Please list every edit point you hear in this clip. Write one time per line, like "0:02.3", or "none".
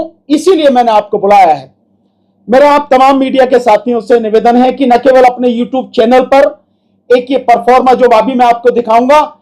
none